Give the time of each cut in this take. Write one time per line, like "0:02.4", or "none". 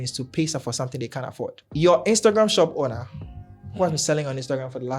0:01.6